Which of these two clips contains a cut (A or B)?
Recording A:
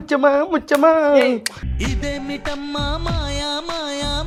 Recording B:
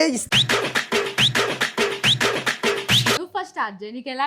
B